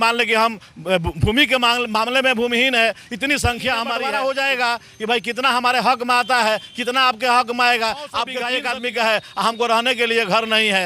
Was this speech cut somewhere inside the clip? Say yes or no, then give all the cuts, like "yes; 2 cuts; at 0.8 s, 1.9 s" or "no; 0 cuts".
yes; 2 cuts; at 3.9 s, 8.4 s